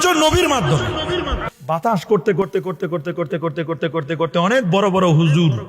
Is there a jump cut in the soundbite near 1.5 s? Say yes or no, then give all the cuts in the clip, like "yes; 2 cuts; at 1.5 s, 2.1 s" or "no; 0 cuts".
yes; 1 cut; at 1.5 s